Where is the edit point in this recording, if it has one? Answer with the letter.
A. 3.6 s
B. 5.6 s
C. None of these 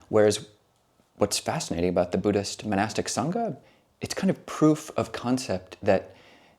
A